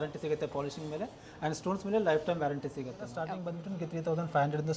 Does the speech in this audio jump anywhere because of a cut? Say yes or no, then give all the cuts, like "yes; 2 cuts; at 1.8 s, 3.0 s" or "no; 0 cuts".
yes; 1 cut; at 3.2 s